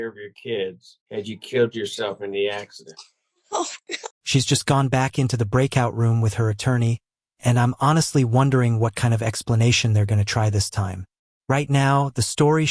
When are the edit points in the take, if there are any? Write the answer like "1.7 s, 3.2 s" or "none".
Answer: 0.9 s, 4.1 s